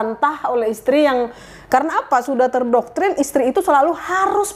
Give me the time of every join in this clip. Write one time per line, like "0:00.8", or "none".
none

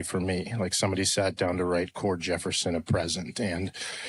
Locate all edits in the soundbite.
none

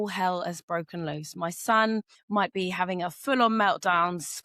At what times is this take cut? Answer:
0:02.2

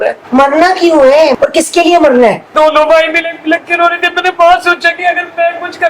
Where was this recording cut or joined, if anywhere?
0:01.4
0:02.5

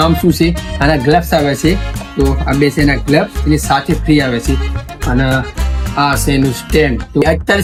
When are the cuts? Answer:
none

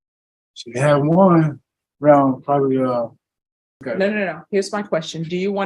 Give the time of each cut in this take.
0:03.8

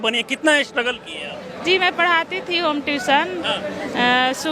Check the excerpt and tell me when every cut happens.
none

